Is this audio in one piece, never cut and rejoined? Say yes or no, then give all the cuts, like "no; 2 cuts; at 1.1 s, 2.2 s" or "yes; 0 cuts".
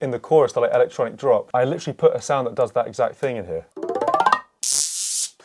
no; 3 cuts; at 1.5 s, 3.7 s, 4.6 s